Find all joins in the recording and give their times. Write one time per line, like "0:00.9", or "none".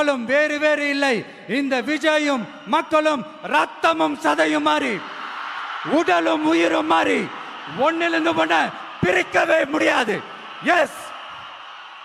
none